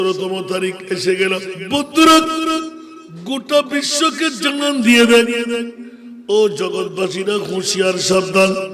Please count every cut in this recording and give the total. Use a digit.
1